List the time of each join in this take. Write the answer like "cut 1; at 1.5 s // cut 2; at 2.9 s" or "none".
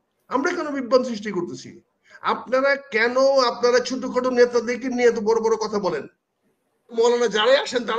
cut 1; at 6.9 s